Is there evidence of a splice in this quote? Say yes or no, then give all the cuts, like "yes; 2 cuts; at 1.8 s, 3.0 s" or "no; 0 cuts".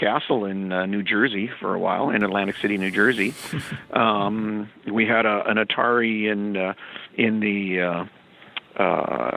no; 0 cuts